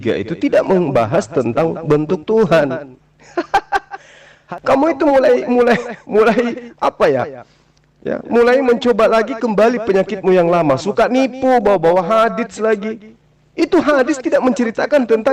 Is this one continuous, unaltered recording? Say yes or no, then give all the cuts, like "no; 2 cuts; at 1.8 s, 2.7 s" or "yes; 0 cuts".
no; 1 cut; at 4.3 s